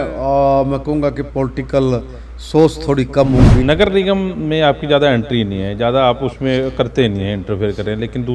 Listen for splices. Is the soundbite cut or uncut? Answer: cut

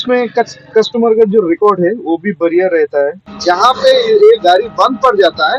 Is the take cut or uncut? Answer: cut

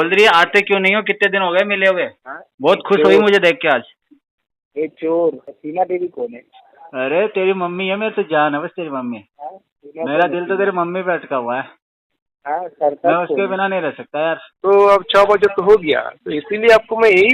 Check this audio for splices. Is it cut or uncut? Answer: cut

